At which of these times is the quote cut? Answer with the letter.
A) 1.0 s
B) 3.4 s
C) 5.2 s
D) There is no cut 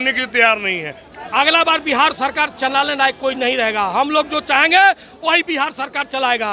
A